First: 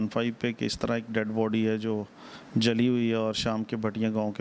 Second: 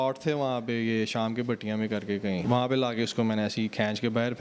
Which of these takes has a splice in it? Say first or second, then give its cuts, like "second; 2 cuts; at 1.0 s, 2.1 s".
second; 1 cut; at 2.4 s